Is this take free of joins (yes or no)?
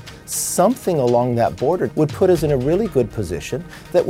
no